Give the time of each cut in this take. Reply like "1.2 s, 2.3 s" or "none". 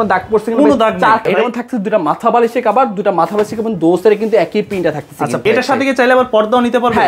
1.3 s, 5.4 s